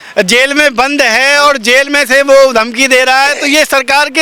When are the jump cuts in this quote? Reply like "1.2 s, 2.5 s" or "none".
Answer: none